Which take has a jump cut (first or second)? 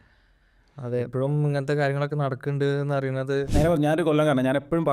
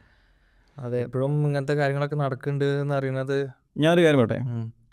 first